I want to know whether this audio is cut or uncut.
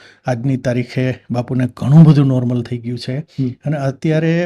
uncut